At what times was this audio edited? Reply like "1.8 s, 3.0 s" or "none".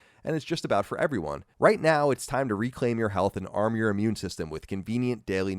1.4 s